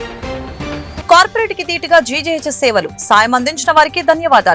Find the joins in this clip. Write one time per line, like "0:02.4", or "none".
0:01.0